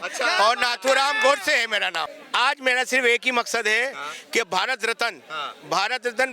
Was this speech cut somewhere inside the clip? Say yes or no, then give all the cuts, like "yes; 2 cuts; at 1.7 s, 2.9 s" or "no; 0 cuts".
yes; 1 cut; at 2.1 s